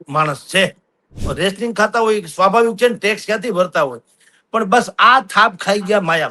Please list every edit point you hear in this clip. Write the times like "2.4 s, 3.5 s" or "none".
1.2 s